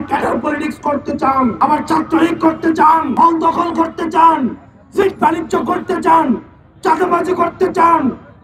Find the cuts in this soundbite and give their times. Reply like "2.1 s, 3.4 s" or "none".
1.5 s, 3.1 s